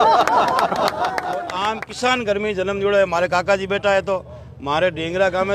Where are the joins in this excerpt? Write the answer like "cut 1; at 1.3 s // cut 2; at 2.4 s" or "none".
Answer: cut 1; at 1.5 s